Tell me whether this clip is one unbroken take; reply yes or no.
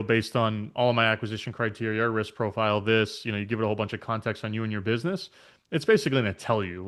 yes